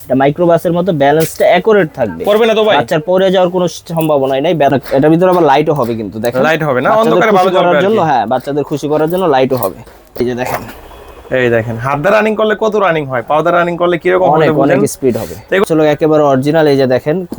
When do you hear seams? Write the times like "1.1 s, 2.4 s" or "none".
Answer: 4.7 s, 10.2 s, 15.6 s